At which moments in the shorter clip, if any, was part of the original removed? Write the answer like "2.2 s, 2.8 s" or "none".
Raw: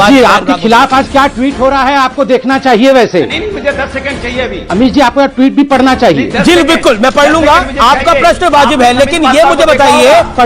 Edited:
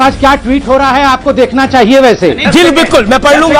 2.4 s